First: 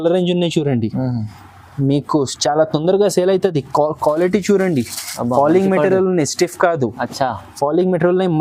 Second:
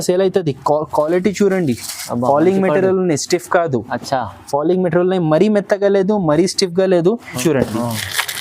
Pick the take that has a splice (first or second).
second